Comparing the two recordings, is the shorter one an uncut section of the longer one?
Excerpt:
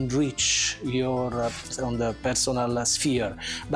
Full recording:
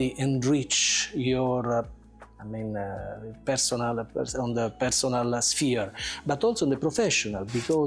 no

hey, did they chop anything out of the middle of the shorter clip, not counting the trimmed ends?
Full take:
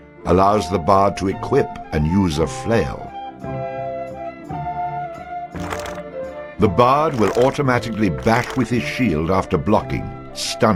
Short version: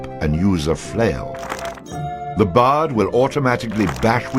yes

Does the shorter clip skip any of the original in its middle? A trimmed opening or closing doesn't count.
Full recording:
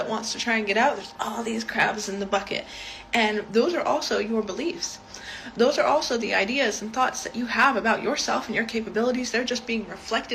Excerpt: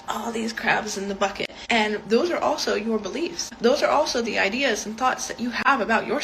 yes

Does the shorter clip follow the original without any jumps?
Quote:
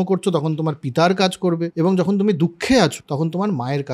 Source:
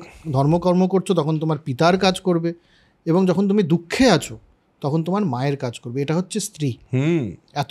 no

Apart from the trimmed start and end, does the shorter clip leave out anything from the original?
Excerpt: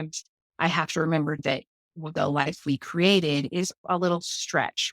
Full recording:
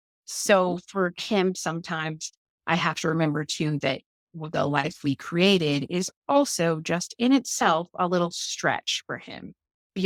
yes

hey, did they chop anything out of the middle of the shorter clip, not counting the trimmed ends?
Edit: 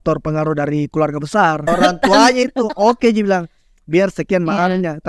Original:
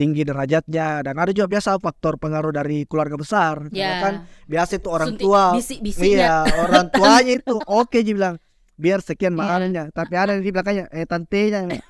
yes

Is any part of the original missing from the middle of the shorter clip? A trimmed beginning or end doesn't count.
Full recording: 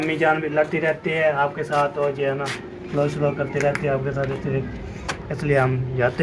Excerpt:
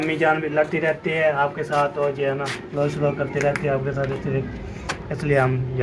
yes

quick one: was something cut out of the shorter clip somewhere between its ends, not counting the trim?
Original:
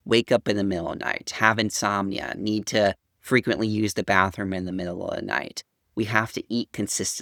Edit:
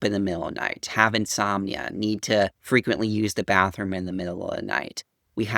yes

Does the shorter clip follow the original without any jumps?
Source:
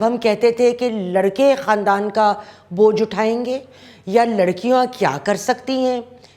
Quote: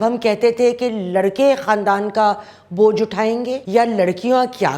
no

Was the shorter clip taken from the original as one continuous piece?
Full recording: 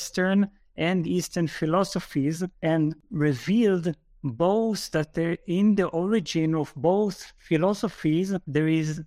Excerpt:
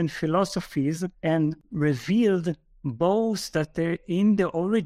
yes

